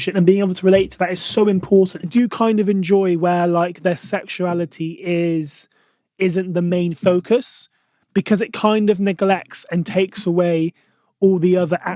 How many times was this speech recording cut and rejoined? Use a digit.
1